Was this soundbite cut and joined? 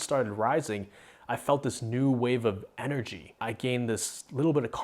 yes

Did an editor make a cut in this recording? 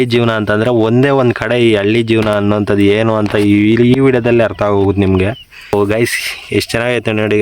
yes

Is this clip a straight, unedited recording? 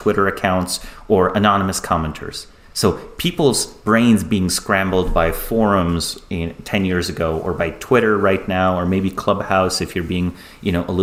yes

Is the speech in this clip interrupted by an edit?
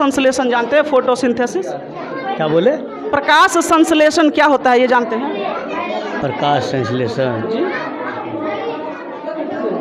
no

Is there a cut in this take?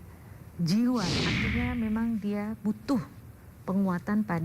yes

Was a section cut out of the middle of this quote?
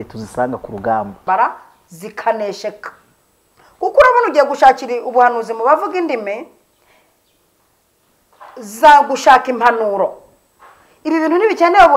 yes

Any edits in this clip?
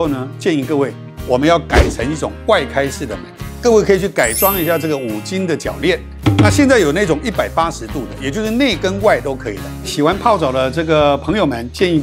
yes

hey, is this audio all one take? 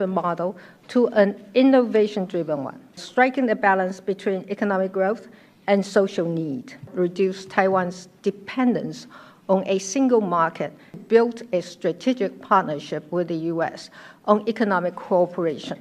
no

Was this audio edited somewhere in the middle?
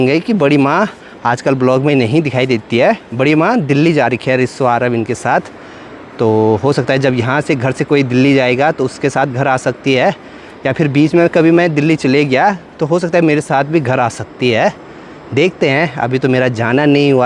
no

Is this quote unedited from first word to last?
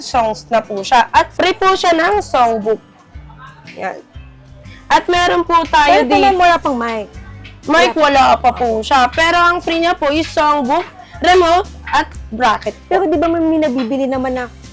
yes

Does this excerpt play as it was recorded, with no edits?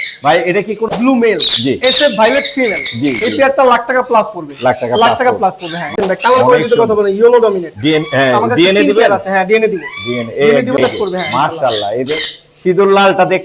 no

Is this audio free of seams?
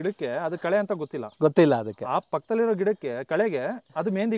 yes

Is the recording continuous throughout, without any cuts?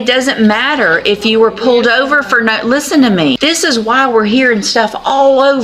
no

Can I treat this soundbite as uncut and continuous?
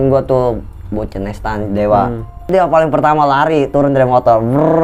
no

